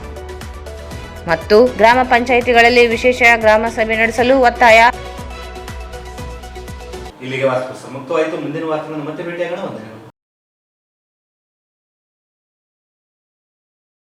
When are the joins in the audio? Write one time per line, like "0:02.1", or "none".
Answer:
none